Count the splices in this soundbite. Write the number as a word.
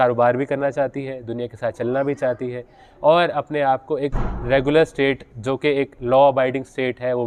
zero